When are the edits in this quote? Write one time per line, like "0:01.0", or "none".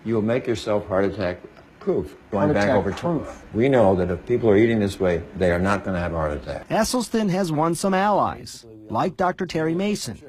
none